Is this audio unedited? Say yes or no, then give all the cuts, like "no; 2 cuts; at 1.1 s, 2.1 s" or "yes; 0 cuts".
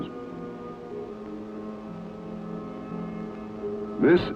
yes; 0 cuts